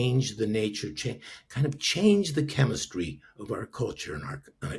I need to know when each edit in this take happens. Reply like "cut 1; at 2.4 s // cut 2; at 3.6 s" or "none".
none